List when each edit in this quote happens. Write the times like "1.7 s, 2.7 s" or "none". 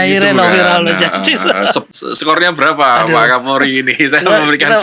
1.9 s